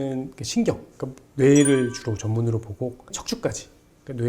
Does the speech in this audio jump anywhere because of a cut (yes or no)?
yes